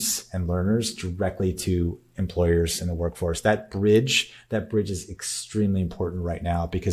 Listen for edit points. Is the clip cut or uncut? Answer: uncut